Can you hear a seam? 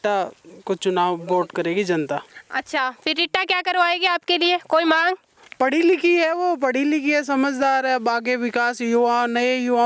no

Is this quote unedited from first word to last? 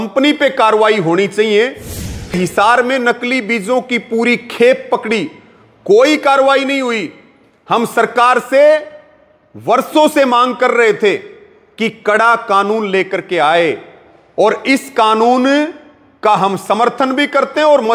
no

